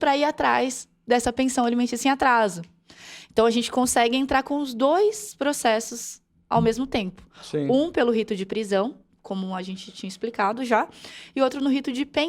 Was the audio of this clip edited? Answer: no; 0 cuts

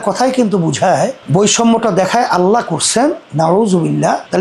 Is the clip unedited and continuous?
no; 1 cut; at 1.2 s

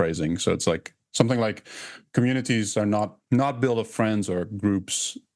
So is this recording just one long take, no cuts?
no; 2 cuts; at 2.0 s, 3.2 s

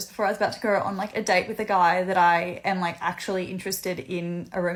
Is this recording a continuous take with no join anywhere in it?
yes; 0 cuts

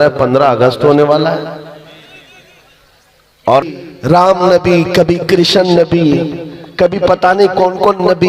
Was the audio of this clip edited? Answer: yes; 1 cut; at 3.6 s

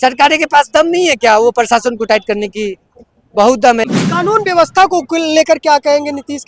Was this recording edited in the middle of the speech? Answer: yes; 1 cut; at 3.9 s

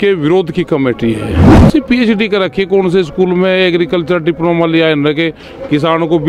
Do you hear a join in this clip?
yes; 1 cut; at 1.5 s

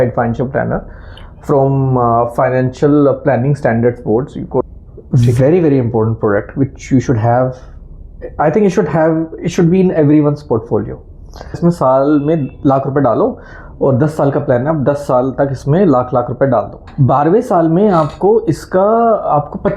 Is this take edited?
yes; 3 cuts; at 4.6 s, 11.5 s, 16.8 s

